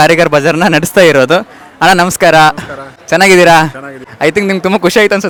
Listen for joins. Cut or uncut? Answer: uncut